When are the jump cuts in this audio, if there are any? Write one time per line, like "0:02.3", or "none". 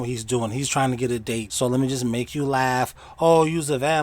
0:01.5